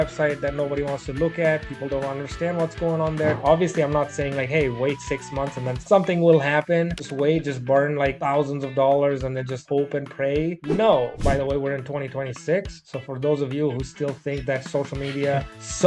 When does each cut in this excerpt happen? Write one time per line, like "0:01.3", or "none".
0:03.4
0:11.2